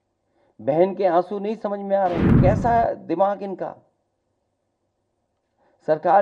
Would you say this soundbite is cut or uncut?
cut